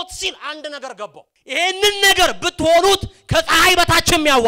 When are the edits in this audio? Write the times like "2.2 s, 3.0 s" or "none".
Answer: 1.3 s